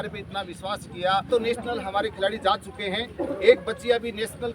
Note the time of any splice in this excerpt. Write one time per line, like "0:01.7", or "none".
0:01.3